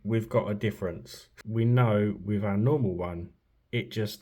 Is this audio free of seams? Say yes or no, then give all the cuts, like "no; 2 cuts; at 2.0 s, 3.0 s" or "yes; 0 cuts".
no; 1 cut; at 1.3 s